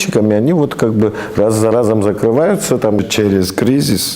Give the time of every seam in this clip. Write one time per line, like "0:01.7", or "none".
0:03.0